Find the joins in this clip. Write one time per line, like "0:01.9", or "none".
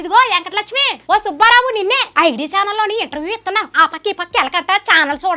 0:00.9
0:02.1